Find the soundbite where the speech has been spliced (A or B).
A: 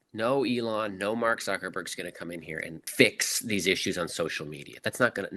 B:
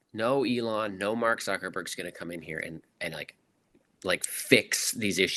A